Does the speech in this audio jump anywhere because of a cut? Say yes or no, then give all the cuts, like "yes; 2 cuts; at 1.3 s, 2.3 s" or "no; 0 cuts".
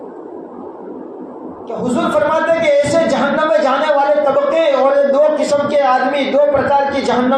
yes; 1 cut; at 1.8 s